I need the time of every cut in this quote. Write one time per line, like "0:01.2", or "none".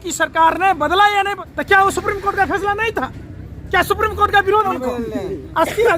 0:01.5
0:04.7